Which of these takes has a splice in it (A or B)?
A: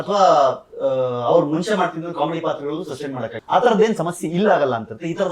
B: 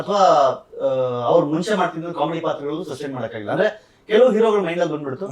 A